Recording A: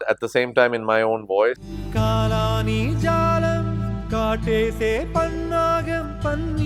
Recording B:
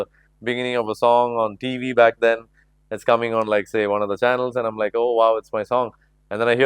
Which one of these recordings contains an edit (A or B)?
A